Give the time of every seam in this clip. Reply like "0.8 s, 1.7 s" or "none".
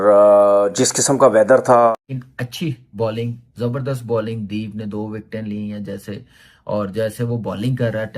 1.9 s

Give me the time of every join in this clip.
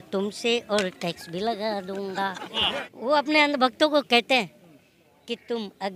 2.5 s

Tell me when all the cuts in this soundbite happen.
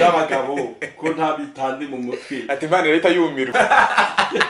3.5 s

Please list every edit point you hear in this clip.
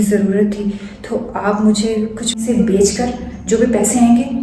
2.4 s

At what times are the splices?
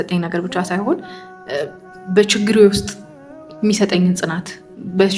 none

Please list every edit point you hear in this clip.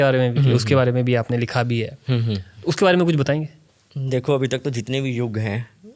none

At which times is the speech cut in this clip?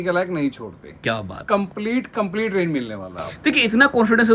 none

